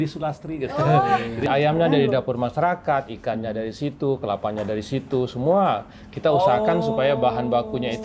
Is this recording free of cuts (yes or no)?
no